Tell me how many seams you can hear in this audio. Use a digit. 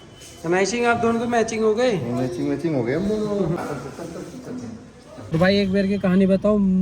2